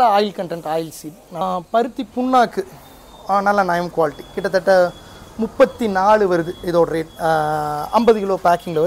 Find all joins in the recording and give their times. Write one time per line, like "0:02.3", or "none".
0:01.4

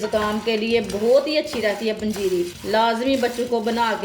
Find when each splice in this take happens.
0:02.6

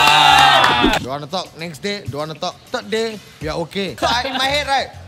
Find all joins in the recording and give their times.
0:00.9
0:02.6
0:04.0

